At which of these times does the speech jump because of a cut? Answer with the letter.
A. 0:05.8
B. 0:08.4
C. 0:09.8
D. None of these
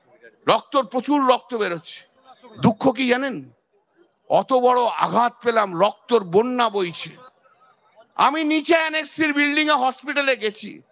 D